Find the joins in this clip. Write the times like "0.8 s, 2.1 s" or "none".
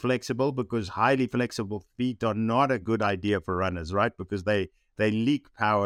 none